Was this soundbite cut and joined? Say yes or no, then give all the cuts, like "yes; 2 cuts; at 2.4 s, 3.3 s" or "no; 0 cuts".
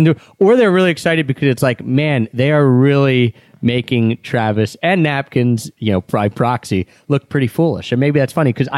yes; 1 cut; at 5.7 s